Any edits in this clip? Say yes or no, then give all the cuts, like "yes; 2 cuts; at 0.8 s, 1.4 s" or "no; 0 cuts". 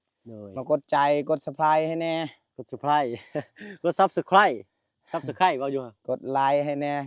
no; 0 cuts